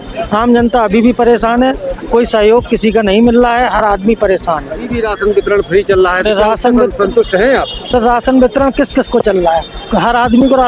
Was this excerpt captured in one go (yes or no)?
no